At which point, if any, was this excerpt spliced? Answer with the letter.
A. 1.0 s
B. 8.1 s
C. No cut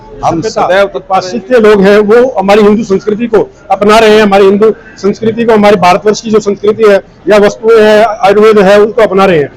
A